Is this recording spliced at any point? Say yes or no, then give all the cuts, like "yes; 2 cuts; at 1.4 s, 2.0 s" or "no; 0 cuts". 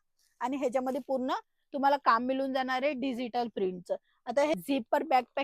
yes; 1 cut; at 4.5 s